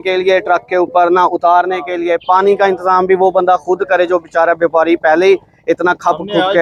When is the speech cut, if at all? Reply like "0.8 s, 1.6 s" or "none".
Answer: none